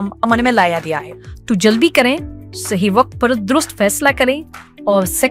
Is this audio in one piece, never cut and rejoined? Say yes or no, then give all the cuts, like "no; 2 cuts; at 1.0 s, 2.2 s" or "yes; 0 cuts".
no; 1 cut; at 1.1 s